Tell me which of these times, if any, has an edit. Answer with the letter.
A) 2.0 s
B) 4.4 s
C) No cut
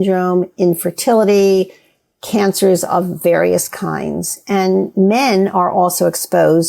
C